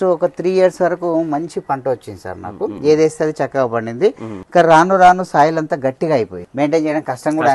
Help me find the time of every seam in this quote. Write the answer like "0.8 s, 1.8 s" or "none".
4.3 s, 6.4 s